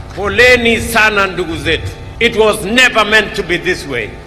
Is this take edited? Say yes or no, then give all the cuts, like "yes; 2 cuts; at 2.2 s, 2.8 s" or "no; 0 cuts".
yes; 1 cut; at 2.0 s